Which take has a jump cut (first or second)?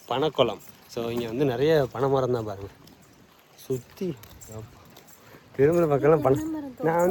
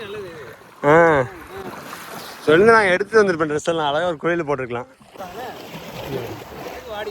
second